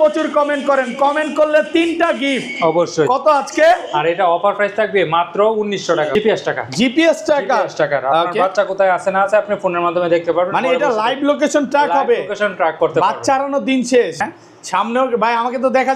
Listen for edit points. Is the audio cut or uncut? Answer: cut